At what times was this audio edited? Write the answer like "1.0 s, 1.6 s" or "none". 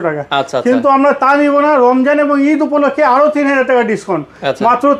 none